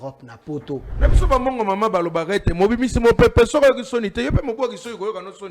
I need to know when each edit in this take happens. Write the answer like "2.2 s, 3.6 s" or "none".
0.9 s